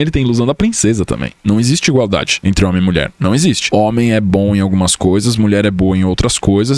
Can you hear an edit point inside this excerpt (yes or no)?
yes